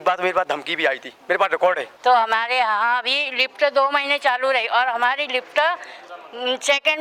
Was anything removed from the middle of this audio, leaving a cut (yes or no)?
yes